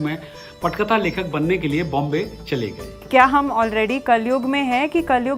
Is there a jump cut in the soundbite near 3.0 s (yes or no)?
yes